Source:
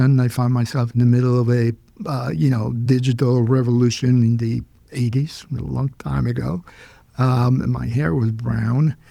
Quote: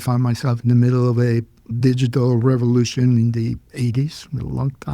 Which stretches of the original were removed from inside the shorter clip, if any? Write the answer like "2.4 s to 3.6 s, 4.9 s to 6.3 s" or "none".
2.0 s to 2.7 s, 4.7 s to 4.8 s